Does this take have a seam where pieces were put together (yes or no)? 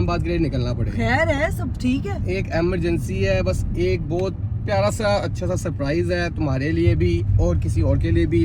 no